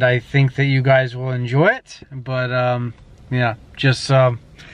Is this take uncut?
yes; 0 cuts

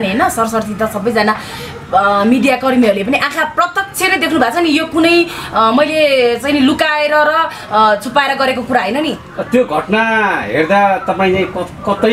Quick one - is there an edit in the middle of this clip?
yes; 1 cut; at 9.3 s

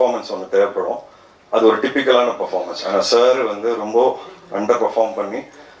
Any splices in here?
no; 0 cuts

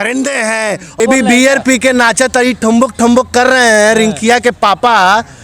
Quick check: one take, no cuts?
no; 1 cut; at 1.0 s

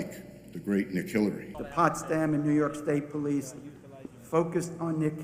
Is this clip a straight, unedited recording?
no; 1 cut; at 1.5 s

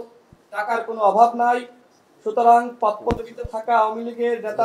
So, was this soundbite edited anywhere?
no; 0 cuts

